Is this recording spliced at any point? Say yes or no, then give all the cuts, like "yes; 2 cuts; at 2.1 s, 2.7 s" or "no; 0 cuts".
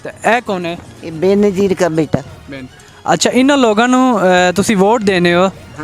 no; 0 cuts